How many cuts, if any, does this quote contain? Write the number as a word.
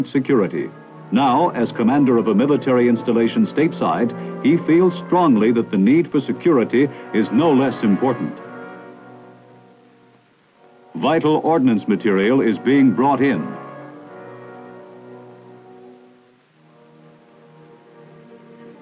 one